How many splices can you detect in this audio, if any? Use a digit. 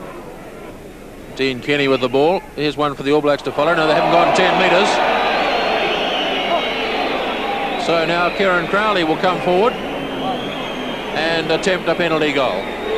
1